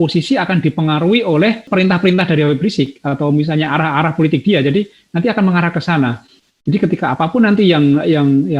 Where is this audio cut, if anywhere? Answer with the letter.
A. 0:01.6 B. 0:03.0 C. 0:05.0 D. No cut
A